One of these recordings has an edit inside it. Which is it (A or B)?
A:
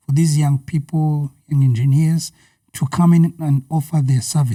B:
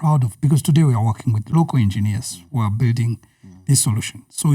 B